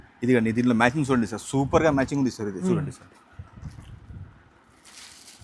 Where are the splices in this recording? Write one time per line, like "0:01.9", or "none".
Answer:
0:02.6